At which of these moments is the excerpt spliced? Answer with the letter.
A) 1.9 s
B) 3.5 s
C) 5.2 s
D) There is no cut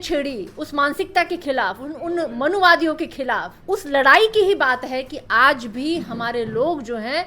B